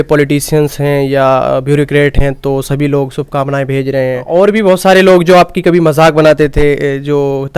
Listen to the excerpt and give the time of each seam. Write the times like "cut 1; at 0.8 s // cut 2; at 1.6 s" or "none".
cut 1; at 4.2 s